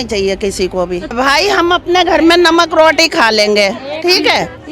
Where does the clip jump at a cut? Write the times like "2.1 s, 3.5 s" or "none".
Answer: 1.2 s